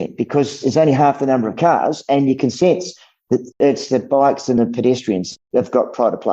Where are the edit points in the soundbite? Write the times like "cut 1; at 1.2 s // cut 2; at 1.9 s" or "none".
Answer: cut 1; at 3.5 s // cut 2; at 5.3 s